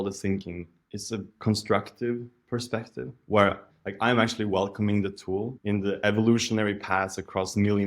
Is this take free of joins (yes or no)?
no